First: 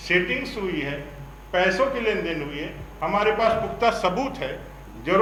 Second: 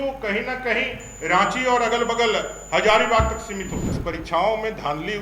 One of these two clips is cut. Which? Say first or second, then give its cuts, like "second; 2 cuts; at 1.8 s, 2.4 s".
second; 1 cut; at 3.9 s